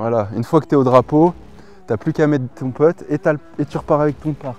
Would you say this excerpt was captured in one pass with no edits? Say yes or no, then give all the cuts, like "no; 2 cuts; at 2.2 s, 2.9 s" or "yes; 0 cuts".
yes; 0 cuts